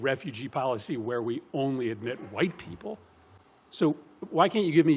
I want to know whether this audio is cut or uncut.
uncut